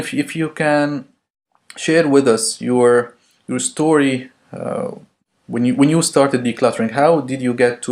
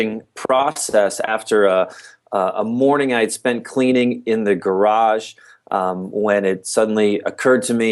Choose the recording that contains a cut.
first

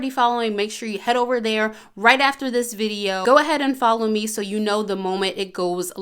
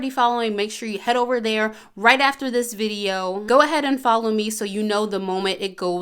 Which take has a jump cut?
first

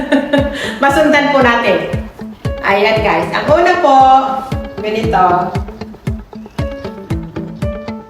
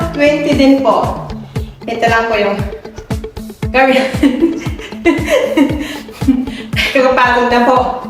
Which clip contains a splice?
first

